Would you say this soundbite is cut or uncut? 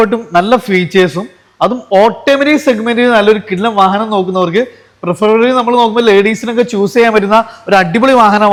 uncut